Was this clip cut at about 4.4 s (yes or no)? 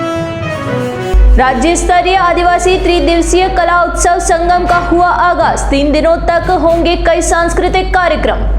no